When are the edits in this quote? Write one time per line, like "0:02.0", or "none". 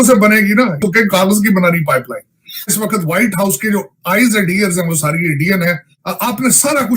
0:00.8
0:02.7
0:06.0